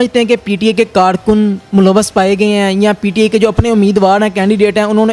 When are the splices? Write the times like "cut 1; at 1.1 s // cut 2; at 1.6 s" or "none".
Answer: none

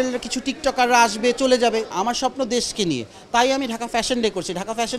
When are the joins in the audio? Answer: cut 1; at 1.9 s

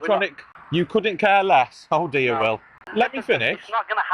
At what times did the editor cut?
cut 1; at 2.8 s

